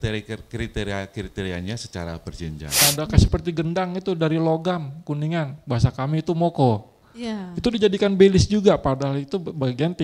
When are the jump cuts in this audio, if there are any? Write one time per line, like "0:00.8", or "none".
0:02.8